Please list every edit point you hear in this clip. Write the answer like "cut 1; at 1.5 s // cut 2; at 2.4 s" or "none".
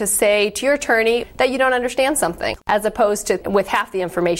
cut 1; at 1.2 s // cut 2; at 2.6 s // cut 3; at 3.4 s